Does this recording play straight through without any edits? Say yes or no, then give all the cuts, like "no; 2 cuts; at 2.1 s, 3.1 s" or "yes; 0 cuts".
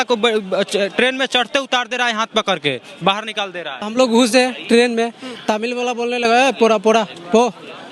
no; 1 cut; at 3.8 s